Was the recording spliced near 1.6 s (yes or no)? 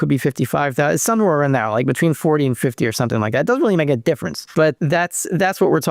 no